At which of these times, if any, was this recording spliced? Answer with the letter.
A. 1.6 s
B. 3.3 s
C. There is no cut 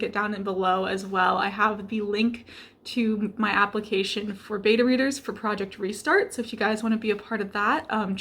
C